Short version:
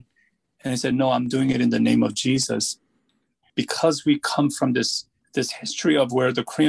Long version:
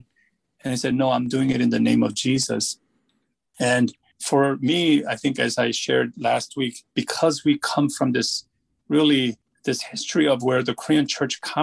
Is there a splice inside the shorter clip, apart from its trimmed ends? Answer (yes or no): yes